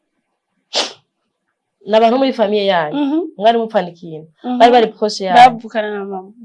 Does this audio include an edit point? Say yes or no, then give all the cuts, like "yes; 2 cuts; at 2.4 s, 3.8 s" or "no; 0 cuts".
no; 0 cuts